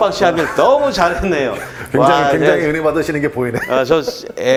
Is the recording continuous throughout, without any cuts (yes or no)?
yes